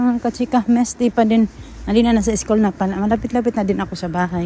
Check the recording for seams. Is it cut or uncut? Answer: uncut